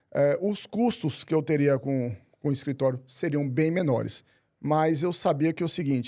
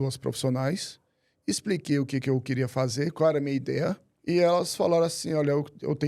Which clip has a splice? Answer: second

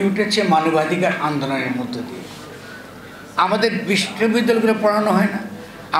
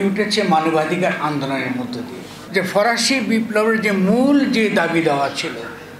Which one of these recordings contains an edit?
second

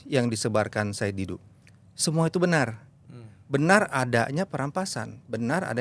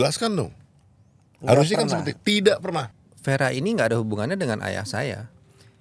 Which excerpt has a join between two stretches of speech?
second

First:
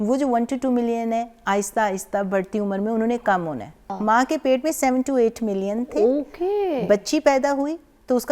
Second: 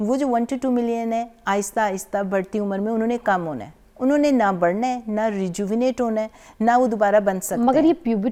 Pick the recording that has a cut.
first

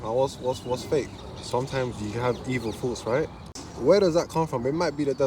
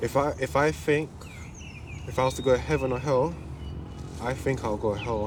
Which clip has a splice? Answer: first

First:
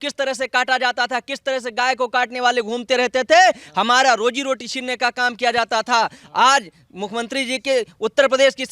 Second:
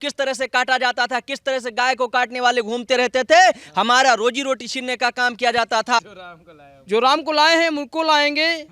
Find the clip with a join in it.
second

